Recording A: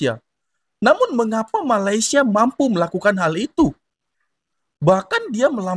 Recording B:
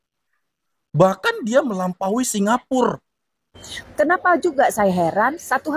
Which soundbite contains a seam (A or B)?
B